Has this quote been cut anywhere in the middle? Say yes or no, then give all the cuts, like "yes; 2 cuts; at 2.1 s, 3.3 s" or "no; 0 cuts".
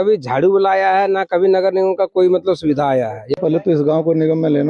yes; 1 cut; at 3.4 s